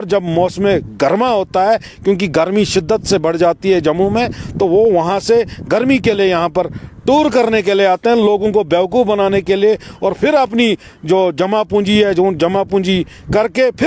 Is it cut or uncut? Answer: uncut